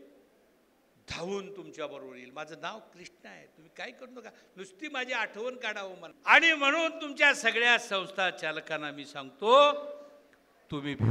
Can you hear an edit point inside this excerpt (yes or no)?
yes